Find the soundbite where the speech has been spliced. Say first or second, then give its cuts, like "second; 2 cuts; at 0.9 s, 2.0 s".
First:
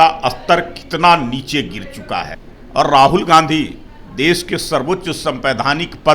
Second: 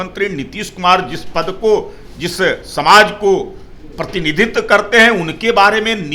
first; 1 cut; at 2.4 s